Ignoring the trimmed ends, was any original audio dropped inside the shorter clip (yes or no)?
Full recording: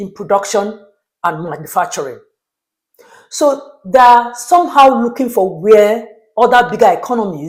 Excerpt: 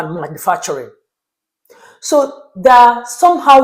no